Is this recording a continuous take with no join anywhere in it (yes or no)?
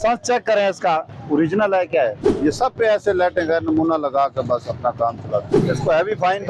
no